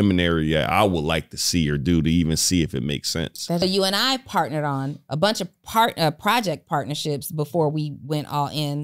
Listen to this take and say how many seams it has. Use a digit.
1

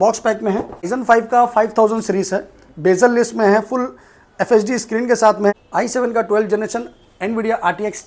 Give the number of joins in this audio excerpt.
2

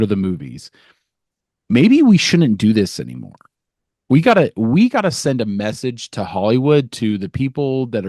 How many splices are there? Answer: 0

